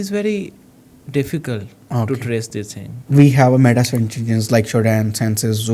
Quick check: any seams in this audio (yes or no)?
yes